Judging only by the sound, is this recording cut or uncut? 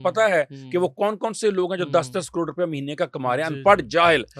uncut